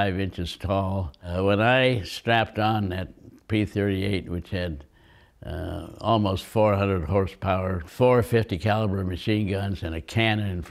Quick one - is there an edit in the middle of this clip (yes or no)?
yes